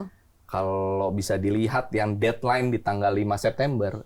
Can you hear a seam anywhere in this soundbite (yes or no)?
no